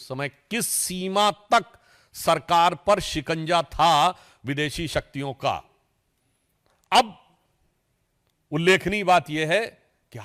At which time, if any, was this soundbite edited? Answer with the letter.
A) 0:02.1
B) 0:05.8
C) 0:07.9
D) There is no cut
D